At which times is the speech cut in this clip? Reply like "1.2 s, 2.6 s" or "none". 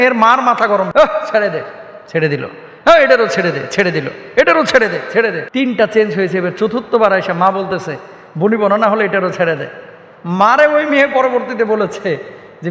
0.9 s, 5.4 s

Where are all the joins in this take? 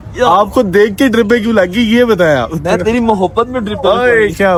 none

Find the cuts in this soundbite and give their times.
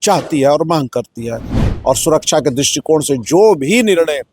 1.6 s

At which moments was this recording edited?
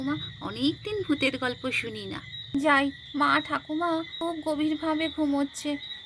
2.3 s, 4.1 s

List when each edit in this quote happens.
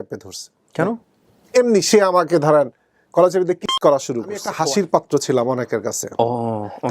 4.5 s

